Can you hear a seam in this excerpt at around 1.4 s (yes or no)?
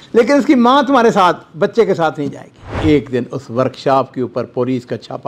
no